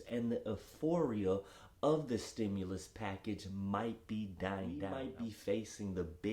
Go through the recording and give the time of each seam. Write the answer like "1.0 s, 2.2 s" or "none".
4.9 s